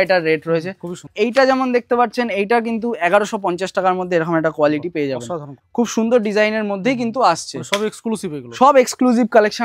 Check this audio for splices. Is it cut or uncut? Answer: cut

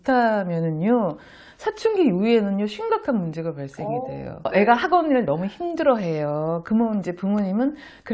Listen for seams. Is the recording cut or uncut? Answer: cut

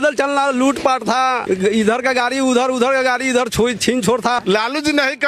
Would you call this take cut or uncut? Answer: cut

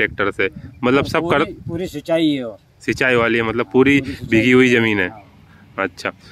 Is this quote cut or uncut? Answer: uncut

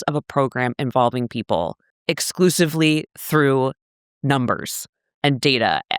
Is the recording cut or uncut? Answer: cut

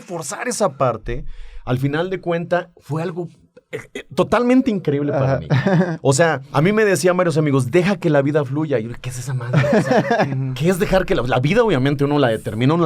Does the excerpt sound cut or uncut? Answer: cut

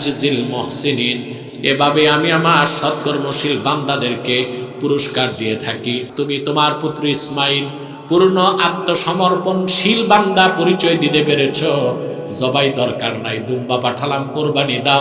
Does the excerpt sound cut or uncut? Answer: cut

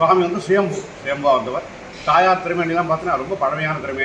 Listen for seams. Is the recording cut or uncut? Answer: uncut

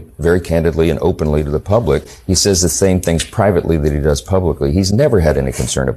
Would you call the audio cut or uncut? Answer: uncut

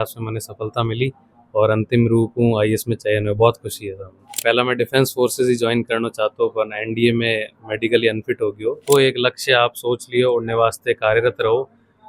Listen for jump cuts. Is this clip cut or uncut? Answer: cut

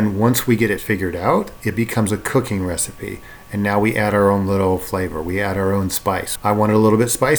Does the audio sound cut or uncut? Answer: cut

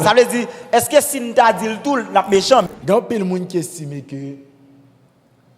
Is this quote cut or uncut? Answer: cut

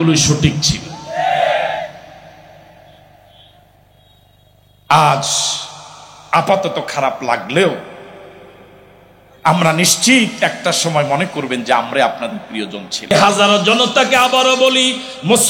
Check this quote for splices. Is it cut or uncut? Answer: cut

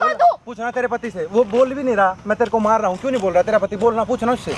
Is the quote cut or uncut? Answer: uncut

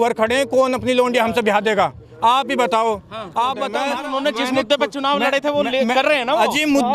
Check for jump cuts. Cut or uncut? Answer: cut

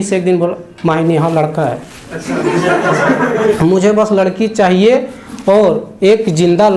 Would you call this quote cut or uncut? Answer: cut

